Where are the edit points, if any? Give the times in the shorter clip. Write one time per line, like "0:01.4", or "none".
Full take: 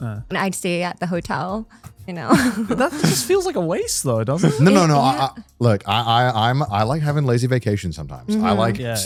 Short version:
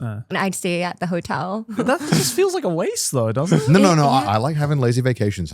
0:01.7
0:04.2